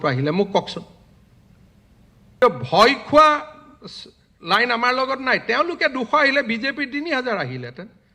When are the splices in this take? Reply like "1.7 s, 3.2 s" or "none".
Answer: 2.4 s